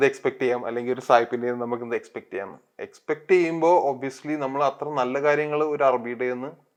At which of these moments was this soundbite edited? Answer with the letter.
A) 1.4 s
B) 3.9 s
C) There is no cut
C